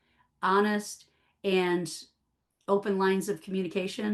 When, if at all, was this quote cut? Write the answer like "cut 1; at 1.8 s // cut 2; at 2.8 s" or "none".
none